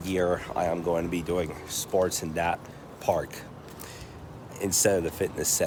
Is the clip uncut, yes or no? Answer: yes